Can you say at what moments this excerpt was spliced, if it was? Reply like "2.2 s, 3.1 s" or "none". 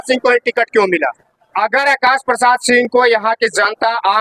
1.5 s